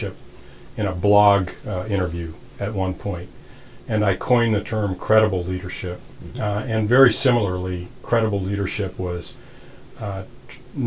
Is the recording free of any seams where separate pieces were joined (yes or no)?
yes